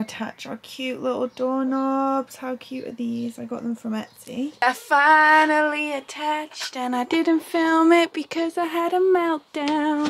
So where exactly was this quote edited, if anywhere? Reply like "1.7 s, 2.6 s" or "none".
4.6 s